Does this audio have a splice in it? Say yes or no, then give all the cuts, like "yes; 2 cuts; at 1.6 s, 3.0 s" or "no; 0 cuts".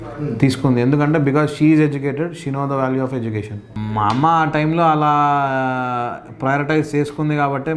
yes; 1 cut; at 3.7 s